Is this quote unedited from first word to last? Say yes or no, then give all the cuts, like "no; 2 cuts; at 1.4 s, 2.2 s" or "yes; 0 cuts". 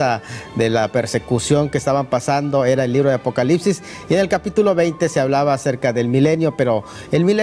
no; 1 cut; at 2.3 s